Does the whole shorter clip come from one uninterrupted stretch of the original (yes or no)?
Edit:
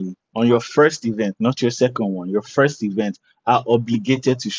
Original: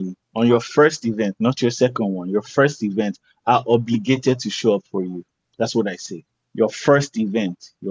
yes